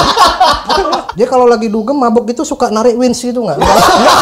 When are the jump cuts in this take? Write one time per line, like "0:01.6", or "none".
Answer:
0:01.1

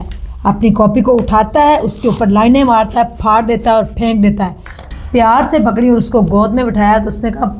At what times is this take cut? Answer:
0:04.9

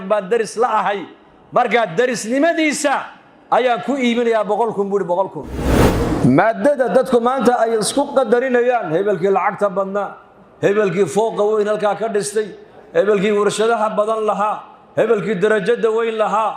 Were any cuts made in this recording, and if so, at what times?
0:05.7

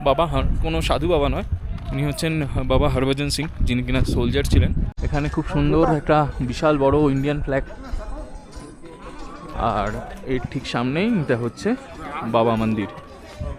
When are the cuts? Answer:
0:05.0

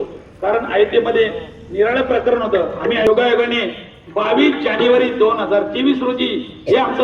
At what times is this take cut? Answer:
0:03.1

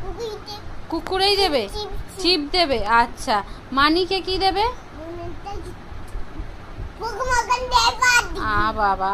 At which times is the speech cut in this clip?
none

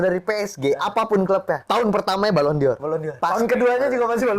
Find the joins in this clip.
0:01.6
0:03.1

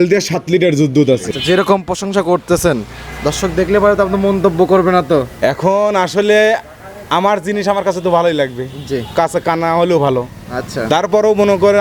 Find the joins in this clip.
0:01.3

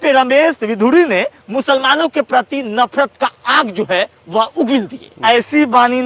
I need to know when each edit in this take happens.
0:05.0

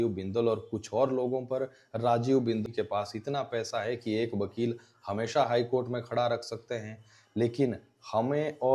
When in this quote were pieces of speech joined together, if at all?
0:02.6

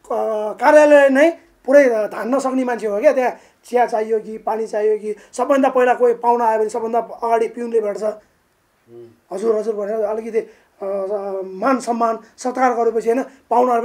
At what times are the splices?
none

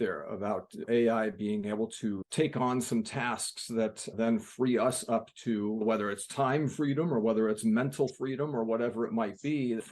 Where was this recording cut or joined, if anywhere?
none

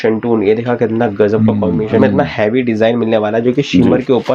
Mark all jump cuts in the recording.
0:02.0

